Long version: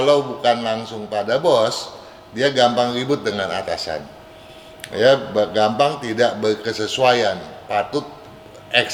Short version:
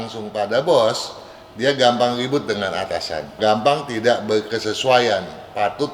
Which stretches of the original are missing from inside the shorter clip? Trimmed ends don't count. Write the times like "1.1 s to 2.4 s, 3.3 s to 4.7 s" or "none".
4.1 s to 5.5 s